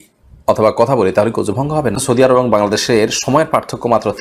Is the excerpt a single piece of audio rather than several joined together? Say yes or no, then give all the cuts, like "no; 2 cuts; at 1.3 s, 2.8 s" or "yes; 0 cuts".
no; 1 cut; at 2.0 s